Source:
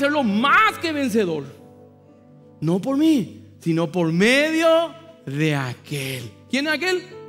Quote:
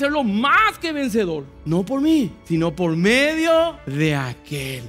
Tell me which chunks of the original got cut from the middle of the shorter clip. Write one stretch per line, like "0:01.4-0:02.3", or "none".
0:01.5-0:02.5
0:03.3-0:03.5
0:05.0-0:05.2